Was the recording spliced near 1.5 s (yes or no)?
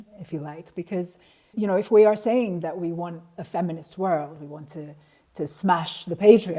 yes